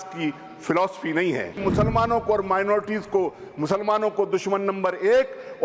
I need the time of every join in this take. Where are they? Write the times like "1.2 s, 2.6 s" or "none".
1.6 s